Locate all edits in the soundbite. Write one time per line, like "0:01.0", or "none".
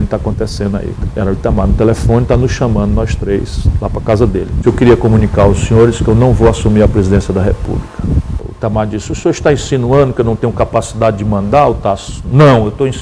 0:01.0
0:04.6
0:08.4